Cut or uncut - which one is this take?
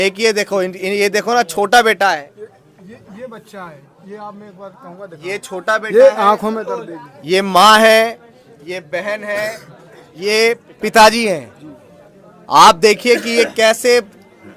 uncut